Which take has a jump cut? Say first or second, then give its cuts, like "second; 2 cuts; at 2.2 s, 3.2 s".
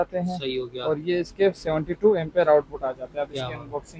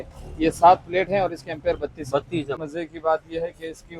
second; 1 cut; at 2.5 s